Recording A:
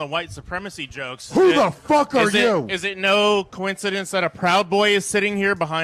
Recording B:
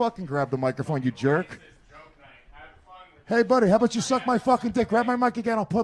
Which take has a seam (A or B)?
A